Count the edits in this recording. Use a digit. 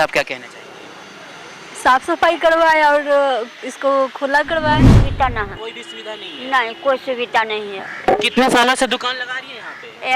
1